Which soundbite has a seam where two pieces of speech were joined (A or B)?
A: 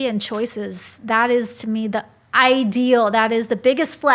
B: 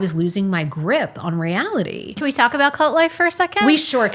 B